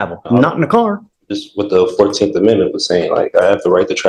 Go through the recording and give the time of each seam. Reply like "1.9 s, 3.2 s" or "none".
none